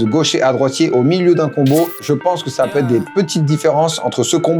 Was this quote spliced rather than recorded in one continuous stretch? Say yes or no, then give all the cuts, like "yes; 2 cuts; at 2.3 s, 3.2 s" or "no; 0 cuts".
yes; 1 cut; at 2.0 s